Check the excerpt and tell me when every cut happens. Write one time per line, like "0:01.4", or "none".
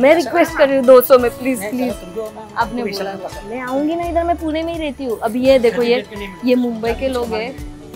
none